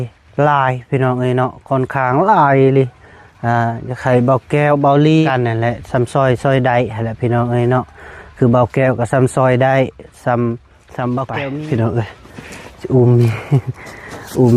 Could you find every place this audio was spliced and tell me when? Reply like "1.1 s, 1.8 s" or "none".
5.3 s, 11.4 s